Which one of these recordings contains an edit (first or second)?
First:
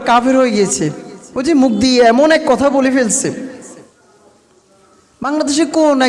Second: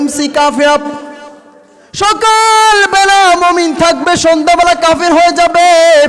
first